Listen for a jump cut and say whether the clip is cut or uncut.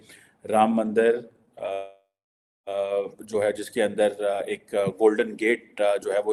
uncut